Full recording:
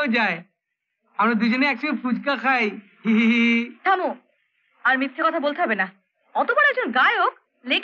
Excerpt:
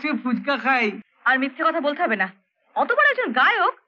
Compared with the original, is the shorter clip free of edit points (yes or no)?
no